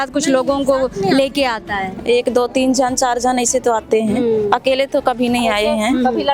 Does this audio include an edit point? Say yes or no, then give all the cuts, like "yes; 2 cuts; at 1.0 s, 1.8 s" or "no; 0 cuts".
no; 0 cuts